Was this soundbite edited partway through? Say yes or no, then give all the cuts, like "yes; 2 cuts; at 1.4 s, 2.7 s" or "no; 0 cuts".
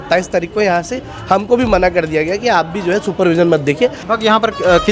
yes; 1 cut; at 4.0 s